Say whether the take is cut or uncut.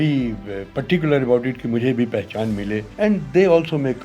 cut